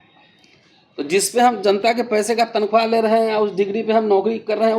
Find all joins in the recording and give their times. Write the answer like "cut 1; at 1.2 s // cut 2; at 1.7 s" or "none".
none

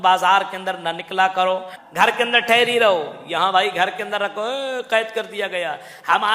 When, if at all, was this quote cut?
cut 1; at 1.7 s

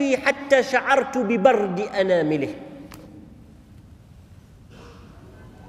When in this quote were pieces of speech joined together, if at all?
none

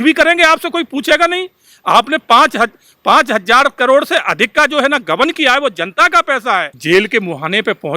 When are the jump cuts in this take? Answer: cut 1; at 6.7 s

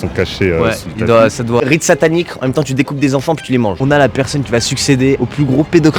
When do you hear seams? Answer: cut 1; at 1.6 s // cut 2; at 3.8 s // cut 3; at 5.2 s

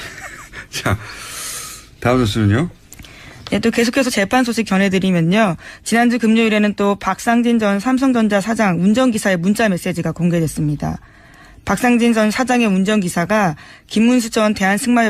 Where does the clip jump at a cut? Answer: cut 1; at 4.1 s

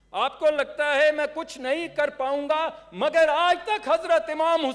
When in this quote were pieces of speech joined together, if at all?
none

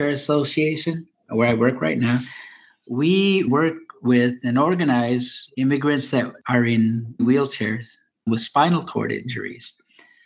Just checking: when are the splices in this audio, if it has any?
none

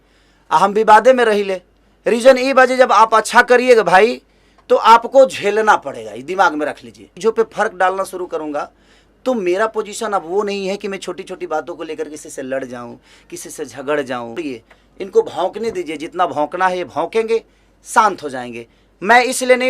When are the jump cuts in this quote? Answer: cut 1; at 7.1 s // cut 2; at 14.4 s

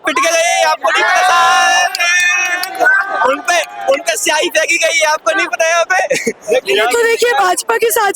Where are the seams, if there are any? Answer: none

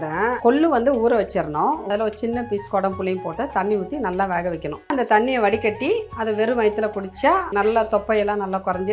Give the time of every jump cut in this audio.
cut 1; at 1.8 s // cut 2; at 4.9 s // cut 3; at 7.5 s

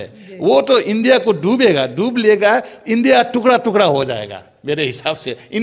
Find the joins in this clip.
none

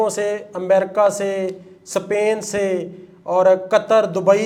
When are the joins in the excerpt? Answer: none

